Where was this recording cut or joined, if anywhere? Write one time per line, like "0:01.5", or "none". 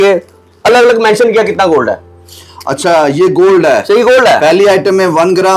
none